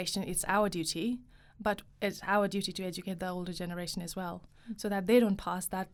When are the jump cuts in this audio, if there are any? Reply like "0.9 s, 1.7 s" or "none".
none